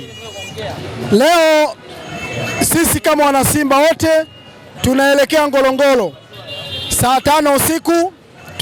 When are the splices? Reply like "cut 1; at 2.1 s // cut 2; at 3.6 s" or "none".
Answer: none

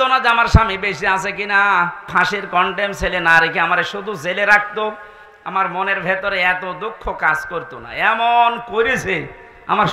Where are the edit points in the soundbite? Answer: cut 1; at 2.1 s

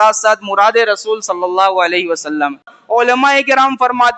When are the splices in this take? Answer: cut 1; at 2.7 s

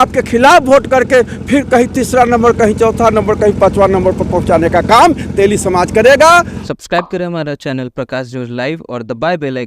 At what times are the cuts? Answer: cut 1; at 6.6 s

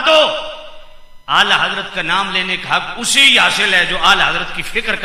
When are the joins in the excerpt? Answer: none

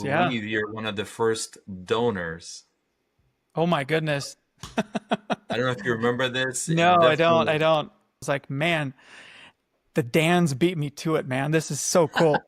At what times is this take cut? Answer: cut 1; at 8.2 s

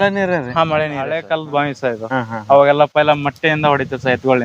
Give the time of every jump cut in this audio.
cut 1; at 1.2 s

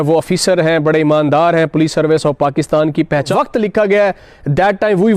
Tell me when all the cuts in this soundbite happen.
cut 1; at 3.3 s

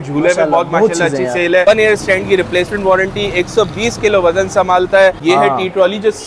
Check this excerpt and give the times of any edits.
cut 1; at 1.6 s // cut 2; at 5.2 s

